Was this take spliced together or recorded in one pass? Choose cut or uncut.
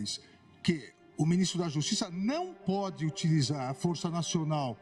uncut